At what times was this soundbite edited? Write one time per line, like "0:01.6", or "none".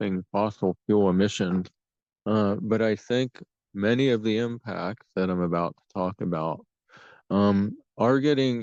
none